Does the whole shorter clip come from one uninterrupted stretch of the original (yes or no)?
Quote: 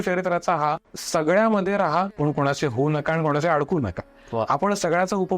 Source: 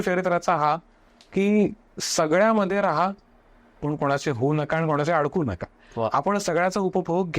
no